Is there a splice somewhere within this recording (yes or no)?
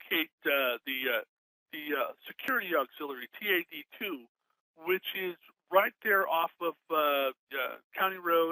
no